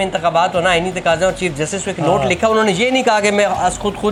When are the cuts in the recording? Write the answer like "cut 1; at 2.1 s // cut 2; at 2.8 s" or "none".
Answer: none